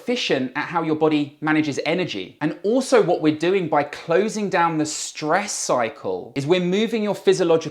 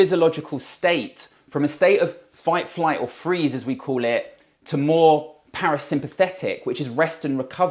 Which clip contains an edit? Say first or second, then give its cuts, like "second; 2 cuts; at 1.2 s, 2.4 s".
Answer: first; 2 cuts; at 2.2 s, 6.3 s